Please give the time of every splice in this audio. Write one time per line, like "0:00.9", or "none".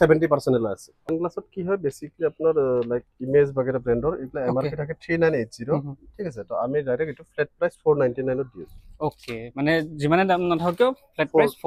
0:00.9